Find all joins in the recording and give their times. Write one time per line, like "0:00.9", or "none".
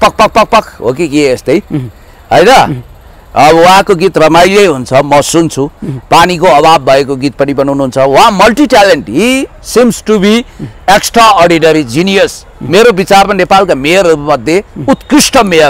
none